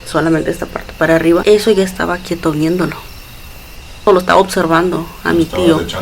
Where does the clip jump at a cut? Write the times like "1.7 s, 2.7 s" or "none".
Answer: 1.4 s, 4.1 s

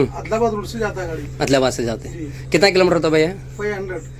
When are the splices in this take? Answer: none

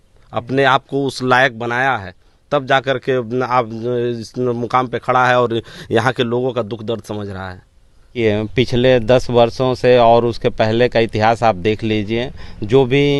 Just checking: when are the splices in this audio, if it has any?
8.1 s

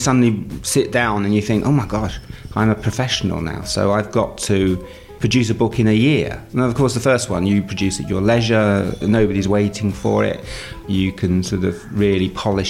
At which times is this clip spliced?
10.9 s

